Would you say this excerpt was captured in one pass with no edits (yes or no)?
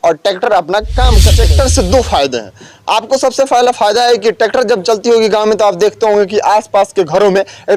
no